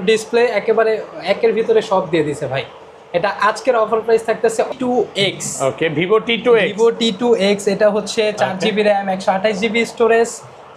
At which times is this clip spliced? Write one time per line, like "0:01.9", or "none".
0:04.7